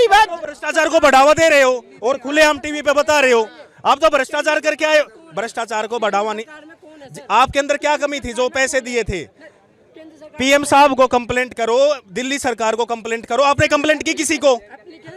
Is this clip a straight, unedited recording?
yes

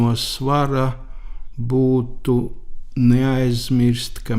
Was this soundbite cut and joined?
no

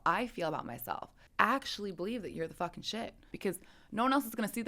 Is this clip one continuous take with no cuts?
no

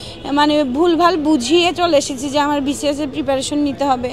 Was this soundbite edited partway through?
no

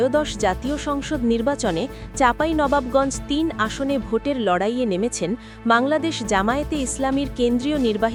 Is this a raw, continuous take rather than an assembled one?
yes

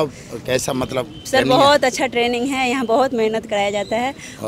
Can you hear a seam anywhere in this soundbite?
no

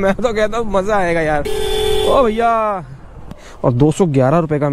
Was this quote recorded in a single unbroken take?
no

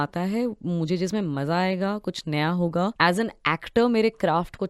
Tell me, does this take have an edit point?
yes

